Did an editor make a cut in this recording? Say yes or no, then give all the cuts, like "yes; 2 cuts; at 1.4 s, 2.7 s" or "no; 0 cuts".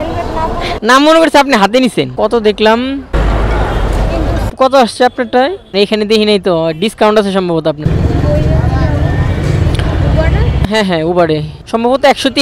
yes; 1 cut; at 7.8 s